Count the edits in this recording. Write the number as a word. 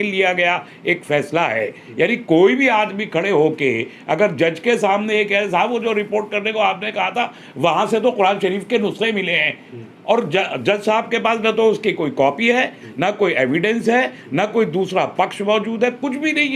zero